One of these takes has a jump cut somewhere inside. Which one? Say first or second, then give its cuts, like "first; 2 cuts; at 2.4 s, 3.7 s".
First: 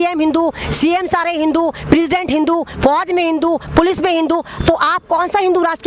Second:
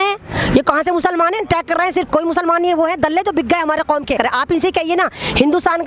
second; 1 cut; at 4.2 s